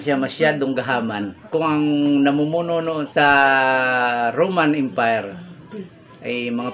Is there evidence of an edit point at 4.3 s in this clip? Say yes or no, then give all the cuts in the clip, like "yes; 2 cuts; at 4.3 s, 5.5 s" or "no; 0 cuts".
no; 2 cuts; at 1.3 s, 3.0 s